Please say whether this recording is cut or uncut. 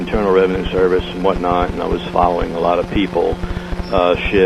cut